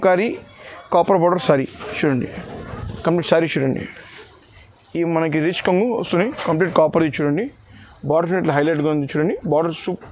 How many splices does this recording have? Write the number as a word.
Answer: zero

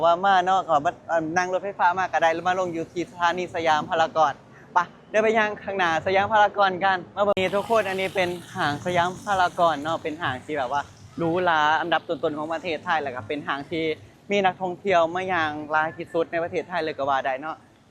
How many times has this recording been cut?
one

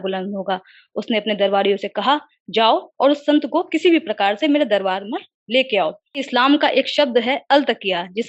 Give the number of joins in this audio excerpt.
one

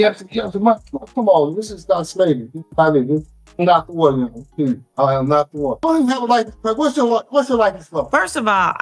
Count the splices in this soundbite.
one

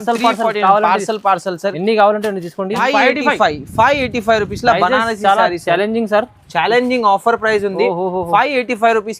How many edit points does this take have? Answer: one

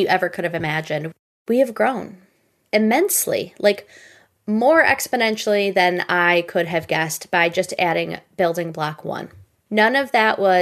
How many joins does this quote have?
one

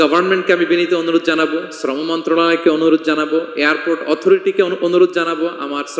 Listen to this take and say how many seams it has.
zero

